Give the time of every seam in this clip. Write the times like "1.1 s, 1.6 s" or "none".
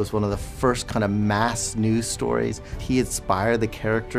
2.7 s